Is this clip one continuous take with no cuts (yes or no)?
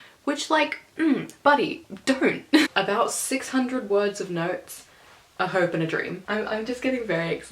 no